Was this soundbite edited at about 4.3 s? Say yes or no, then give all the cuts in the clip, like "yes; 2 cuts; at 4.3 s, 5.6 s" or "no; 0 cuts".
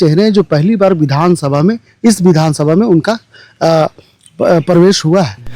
no; 0 cuts